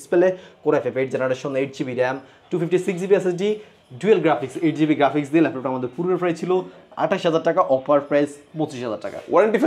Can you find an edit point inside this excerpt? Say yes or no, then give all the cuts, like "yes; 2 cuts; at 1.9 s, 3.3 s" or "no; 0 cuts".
no; 0 cuts